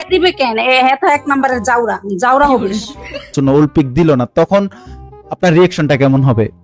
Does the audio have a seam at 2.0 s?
no; 1 cut; at 3.3 s

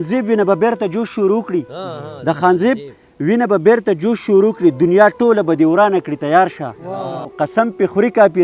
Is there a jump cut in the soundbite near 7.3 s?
yes; 1 cut; at 7.3 s

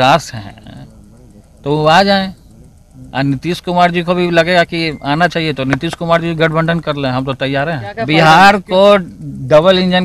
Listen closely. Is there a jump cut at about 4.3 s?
no; 1 cut; at 8.0 s

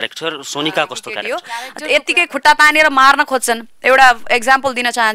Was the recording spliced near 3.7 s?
no; 1 cut; at 1.2 s

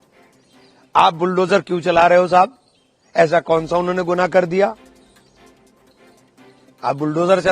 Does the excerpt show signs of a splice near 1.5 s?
no; 0 cuts

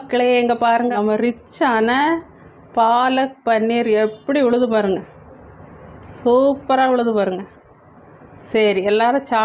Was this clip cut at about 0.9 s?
yes; 1 cut; at 0.9 s

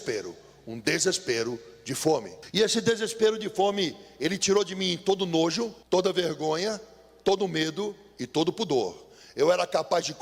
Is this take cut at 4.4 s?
no; 2 cuts; at 2.4 s, 5.8 s

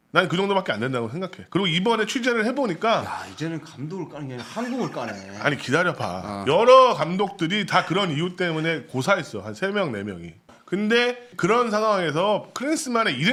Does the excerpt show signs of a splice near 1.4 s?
no; 0 cuts

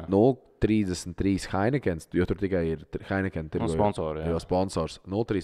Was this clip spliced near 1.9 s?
no; 0 cuts

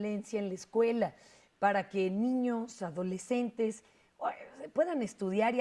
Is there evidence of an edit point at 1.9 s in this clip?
yes; 1 cut; at 1.9 s

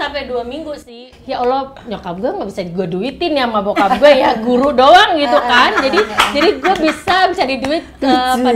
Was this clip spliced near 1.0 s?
yes; 1 cut; at 1.0 s

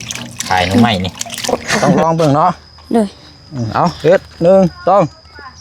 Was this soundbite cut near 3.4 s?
no; 1 cut; at 1.6 s

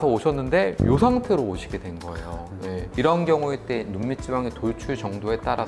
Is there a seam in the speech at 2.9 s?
yes; 1 cut; at 2.9 s

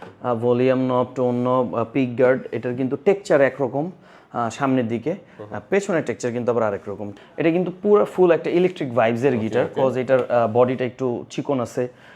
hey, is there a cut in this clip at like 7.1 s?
yes; 1 cut; at 7.1 s

